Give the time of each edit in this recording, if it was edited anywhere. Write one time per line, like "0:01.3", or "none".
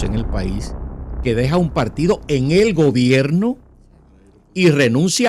none